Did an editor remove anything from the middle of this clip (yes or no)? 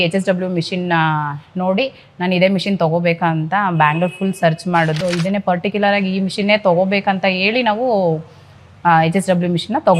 yes